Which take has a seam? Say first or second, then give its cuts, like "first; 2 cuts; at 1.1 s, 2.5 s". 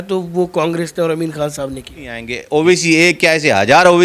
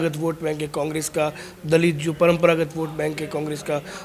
first; 1 cut; at 2.3 s